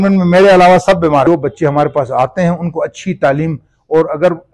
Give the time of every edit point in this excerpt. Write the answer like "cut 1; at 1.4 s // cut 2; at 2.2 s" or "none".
cut 1; at 1.2 s